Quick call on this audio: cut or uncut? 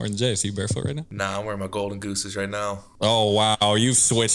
cut